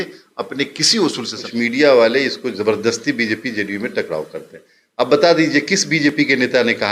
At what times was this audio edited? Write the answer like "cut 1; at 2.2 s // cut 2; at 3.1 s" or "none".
cut 1; at 1.4 s